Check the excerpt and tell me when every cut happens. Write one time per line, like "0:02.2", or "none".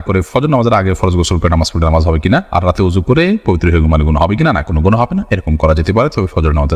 none